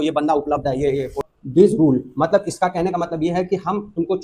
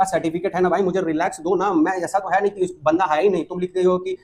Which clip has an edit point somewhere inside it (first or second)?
first